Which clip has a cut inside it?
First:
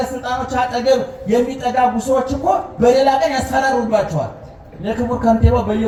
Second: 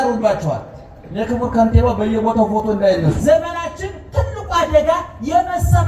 second; 1 cut; at 3.2 s

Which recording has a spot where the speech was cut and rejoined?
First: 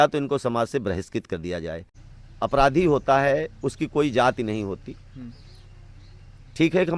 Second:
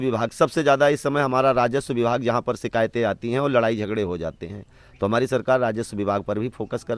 first; 1 cut; at 1.9 s

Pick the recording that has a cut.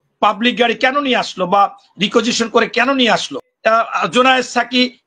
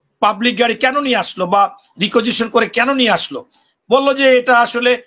first; 1 cut; at 3.5 s

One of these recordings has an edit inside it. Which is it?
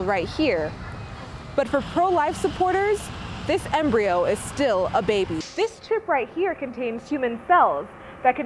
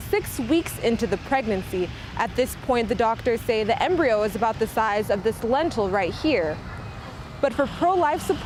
first; 1 cut; at 5.5 s

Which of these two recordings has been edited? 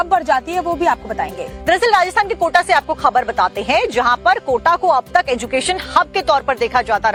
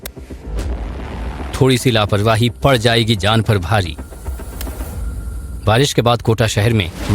second; 1 cut; at 2.5 s

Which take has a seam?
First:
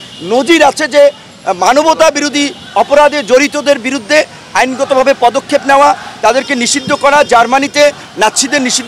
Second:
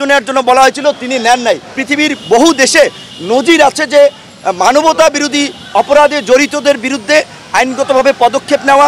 second; 1 cut; at 1.7 s

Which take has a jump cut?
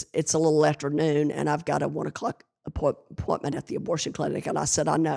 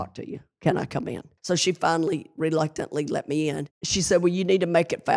second; 2 cuts; at 1.3 s, 3.8 s

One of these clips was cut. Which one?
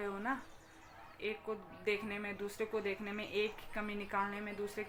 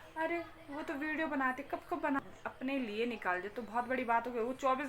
second; 1 cut; at 2.2 s

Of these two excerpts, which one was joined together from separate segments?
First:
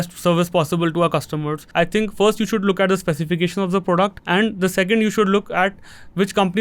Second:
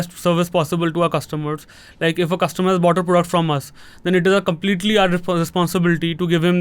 first; 2 cuts; at 1.6 s, 4.2 s

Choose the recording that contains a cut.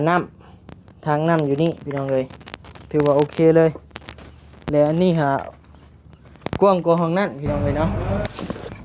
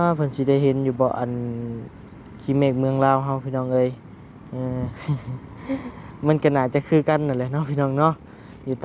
first; 1 cut; at 7.9 s

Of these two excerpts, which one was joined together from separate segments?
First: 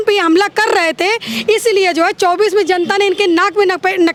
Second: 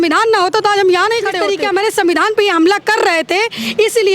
second; 1 cut; at 1.4 s

